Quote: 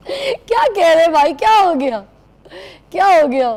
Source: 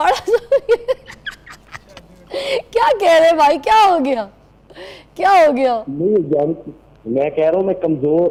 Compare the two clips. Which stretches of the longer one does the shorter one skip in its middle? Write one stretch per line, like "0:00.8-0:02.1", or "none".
none